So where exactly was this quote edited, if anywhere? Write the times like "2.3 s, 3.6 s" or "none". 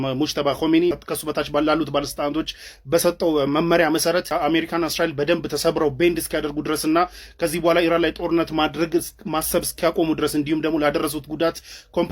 1.1 s, 4.3 s